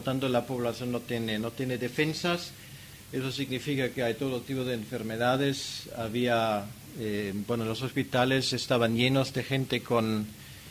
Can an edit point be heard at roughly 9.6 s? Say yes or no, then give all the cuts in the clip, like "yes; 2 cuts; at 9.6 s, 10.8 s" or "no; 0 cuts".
no; 1 cut; at 6.0 s